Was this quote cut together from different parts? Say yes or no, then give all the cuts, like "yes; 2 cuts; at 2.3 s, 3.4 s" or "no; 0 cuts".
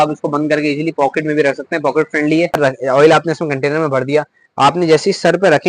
yes; 1 cut; at 2.6 s